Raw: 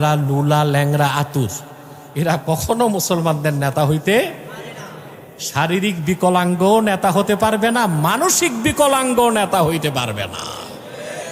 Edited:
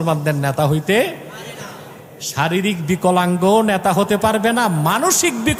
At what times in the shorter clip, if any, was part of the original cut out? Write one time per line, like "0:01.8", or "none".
none